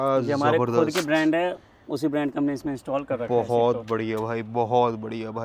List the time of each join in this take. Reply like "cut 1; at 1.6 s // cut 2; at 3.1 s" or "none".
none

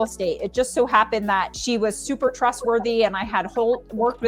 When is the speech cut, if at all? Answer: cut 1; at 1.6 s

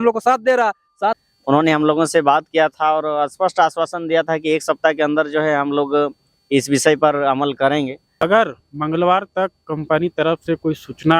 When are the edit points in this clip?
cut 1; at 1.2 s // cut 2; at 8.2 s

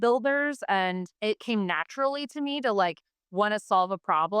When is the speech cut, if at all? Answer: cut 1; at 1.1 s

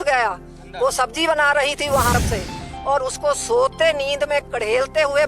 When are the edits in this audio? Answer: cut 1; at 2.1 s

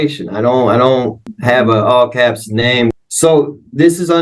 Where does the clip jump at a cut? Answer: cut 1; at 1.4 s // cut 2; at 2.9 s

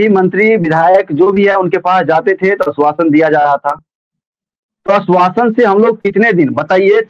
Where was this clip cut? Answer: none

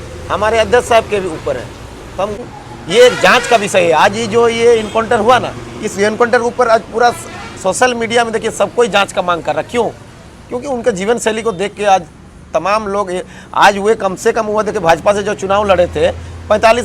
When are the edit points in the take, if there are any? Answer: cut 1; at 2.5 s

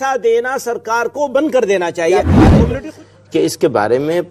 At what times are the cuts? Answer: cut 1; at 2.7 s

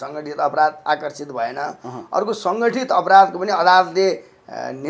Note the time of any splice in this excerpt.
none

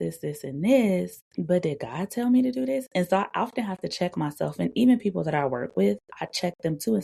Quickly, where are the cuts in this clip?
cut 1; at 1.2 s

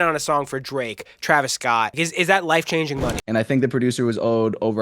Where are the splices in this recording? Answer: cut 1; at 1.9 s // cut 2; at 3.3 s

